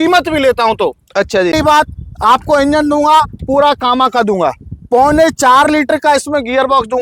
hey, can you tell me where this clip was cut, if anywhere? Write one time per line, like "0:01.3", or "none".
0:01.5